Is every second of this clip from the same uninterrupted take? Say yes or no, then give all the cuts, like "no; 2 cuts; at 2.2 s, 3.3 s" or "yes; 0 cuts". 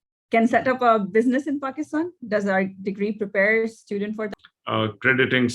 no; 1 cut; at 4.4 s